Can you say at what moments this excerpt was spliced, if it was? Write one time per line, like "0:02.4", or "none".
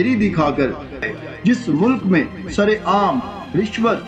0:01.1